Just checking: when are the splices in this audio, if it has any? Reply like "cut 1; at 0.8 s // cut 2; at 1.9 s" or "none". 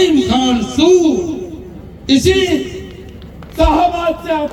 none